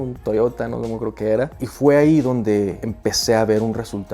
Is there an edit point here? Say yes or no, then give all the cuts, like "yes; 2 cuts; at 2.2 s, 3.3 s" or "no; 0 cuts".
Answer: yes; 1 cut; at 1.5 s